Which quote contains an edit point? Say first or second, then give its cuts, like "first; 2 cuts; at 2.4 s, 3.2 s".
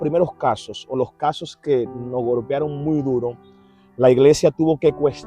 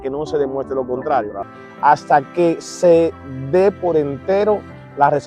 second; 1 cut; at 1.5 s